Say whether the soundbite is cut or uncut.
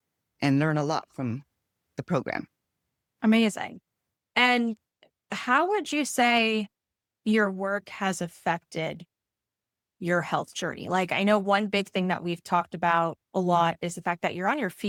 uncut